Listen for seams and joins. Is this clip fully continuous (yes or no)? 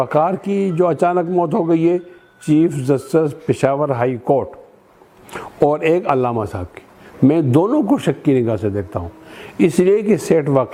yes